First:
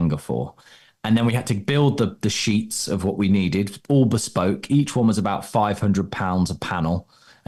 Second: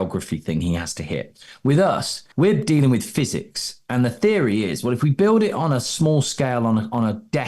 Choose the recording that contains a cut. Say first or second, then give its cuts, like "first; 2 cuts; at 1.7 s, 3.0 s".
second; 1 cut; at 2.2 s